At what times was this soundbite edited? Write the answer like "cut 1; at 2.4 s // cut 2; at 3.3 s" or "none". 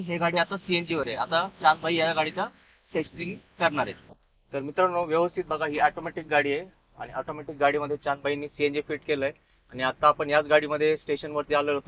none